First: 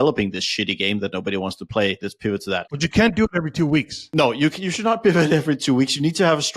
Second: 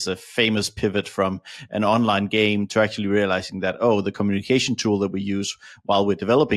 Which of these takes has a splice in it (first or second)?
first